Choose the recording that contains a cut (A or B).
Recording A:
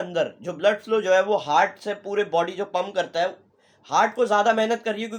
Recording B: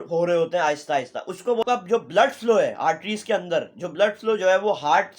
B